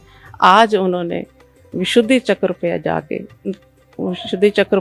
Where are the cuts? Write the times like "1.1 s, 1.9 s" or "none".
none